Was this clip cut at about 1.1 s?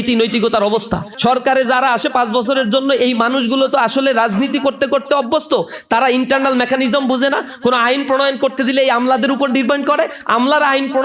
yes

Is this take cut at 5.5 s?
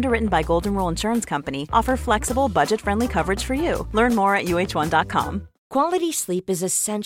yes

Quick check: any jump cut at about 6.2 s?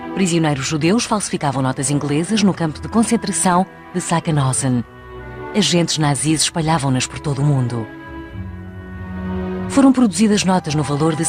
yes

